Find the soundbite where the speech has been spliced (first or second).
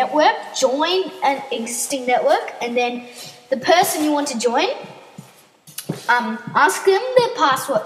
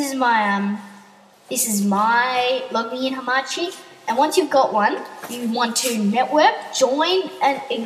first